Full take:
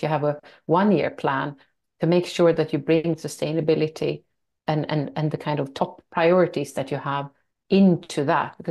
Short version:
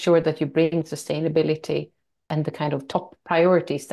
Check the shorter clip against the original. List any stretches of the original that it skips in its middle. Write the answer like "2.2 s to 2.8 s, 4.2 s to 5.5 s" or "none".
4.6 s to 5.1 s